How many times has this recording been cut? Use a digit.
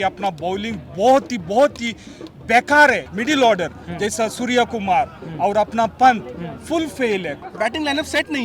2